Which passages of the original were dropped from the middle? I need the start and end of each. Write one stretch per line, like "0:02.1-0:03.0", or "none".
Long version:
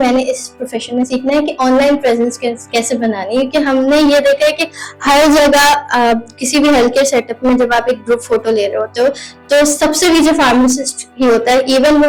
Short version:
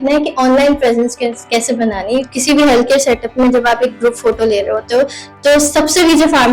0:03.5-0:06.3